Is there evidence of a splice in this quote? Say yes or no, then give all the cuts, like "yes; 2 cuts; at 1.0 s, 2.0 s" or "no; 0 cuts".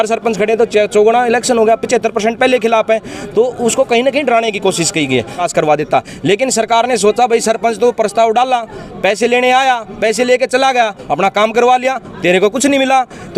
yes; 1 cut; at 5.4 s